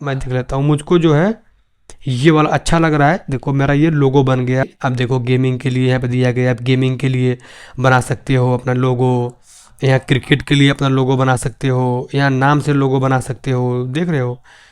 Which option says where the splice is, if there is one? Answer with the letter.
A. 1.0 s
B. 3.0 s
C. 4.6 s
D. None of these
C